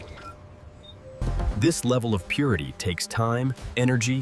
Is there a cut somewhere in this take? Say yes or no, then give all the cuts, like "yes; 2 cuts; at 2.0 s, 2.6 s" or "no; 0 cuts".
yes; 1 cut; at 1.2 s